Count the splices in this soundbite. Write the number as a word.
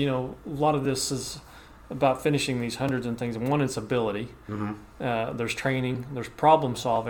zero